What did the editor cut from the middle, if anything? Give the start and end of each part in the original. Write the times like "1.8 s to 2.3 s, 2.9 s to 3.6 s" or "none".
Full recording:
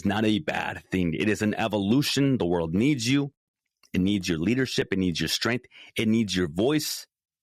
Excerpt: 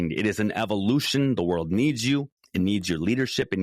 3.4 s to 3.8 s